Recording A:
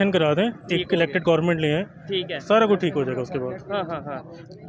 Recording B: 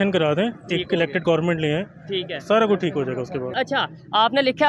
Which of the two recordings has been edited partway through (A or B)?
B